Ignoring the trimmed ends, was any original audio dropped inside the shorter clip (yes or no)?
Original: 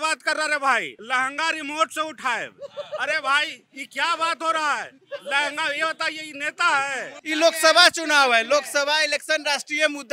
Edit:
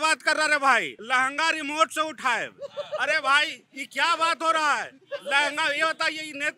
no